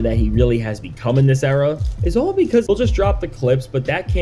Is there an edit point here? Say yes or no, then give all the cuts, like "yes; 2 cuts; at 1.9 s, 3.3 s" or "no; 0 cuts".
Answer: yes; 1 cut; at 2.7 s